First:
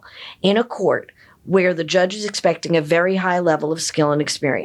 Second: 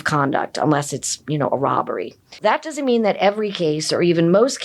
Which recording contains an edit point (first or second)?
second